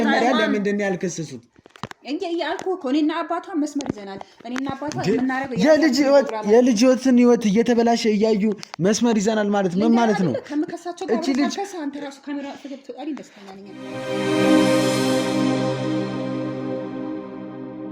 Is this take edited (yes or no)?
yes